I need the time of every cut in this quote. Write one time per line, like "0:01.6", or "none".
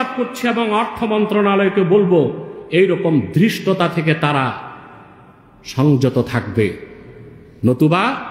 none